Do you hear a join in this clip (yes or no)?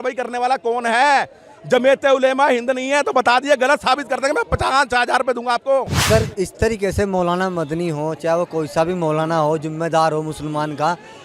yes